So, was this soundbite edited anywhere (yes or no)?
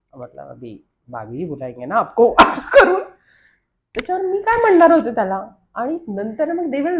no